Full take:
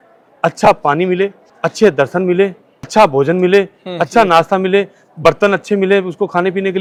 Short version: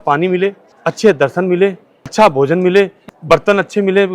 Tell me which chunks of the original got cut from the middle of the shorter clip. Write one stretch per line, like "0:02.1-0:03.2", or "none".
0:03.9-0:05.0

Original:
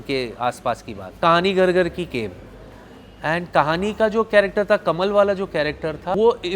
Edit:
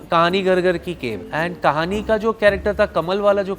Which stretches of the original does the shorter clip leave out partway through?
0:02.3-0:03.1

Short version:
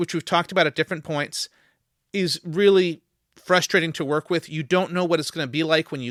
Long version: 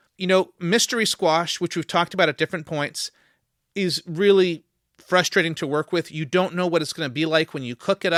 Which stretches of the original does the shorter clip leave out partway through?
none

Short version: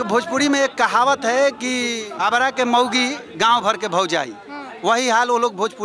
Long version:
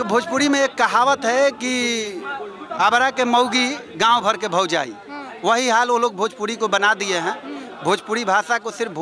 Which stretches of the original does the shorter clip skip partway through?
0:02.0-0:02.6

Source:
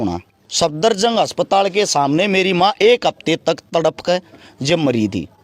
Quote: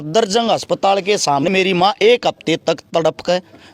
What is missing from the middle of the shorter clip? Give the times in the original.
0:02.1-0:02.2

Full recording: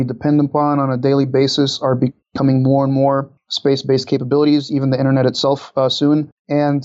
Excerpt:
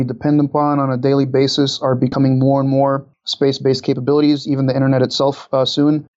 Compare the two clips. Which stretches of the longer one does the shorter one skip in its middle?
0:02.1-0:02.4

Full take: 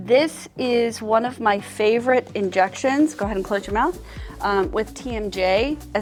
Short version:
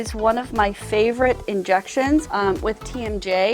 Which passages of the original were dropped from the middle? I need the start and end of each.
0:03.1-0:04.4

